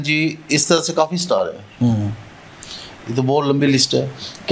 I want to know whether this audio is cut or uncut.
uncut